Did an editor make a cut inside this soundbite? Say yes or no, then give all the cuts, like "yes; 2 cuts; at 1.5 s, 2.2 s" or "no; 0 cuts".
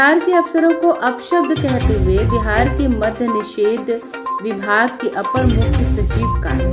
no; 0 cuts